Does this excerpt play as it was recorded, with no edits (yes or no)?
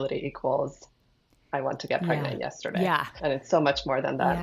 no